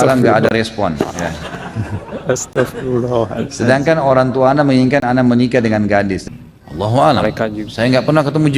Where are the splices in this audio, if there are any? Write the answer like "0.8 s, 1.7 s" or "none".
6.2 s